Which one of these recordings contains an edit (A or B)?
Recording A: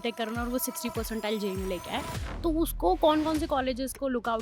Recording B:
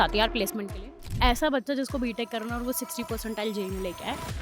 B